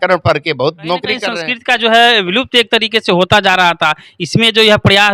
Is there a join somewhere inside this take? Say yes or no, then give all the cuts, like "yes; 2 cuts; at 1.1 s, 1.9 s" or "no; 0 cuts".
yes; 1 cut; at 1.3 s